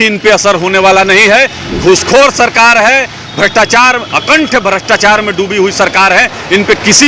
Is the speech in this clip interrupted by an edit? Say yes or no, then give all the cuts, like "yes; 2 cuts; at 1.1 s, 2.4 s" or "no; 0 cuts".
no; 0 cuts